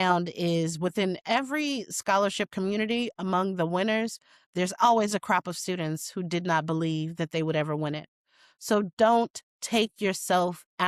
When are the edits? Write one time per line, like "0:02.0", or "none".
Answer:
none